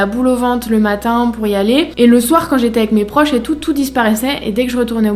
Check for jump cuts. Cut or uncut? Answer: uncut